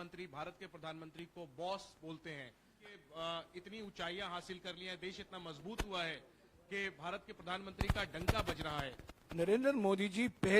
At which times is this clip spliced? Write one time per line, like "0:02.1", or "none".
0:02.9
0:09.1